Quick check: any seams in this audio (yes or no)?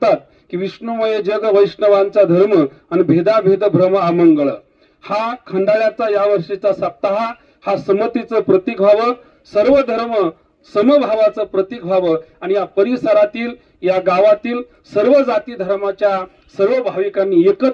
no